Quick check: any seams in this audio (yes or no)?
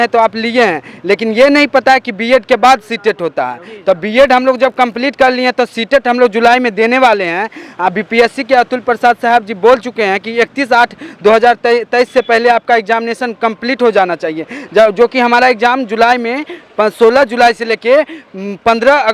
no